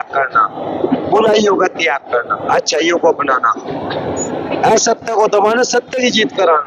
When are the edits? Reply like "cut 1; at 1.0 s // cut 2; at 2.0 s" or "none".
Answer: none